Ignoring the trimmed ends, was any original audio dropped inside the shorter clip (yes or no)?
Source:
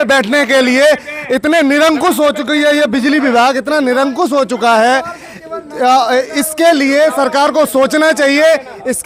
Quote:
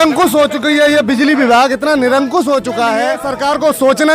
yes